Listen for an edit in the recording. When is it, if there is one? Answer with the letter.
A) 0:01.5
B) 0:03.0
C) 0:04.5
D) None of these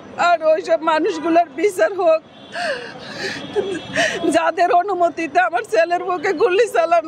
D